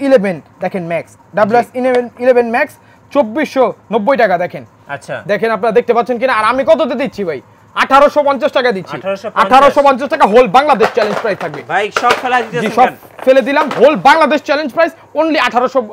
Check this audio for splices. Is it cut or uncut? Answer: uncut